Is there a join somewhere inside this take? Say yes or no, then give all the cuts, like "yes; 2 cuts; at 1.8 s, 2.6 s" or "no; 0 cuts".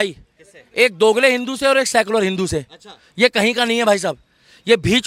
no; 0 cuts